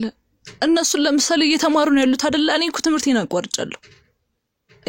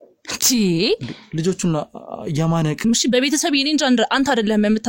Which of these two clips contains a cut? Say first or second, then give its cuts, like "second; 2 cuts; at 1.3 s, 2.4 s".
second; 1 cut; at 2.8 s